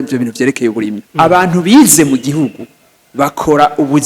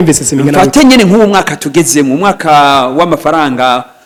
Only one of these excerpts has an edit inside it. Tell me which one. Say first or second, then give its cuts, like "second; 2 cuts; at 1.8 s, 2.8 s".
first; 1 cut; at 1.0 s